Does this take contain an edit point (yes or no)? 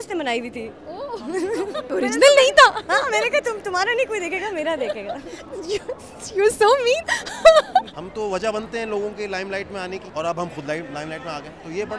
yes